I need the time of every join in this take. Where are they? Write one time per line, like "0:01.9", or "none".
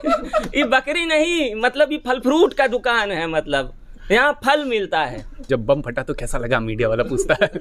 0:05.4